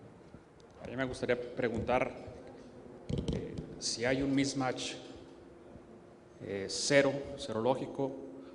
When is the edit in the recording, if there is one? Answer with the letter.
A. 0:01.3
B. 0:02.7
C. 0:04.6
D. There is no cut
D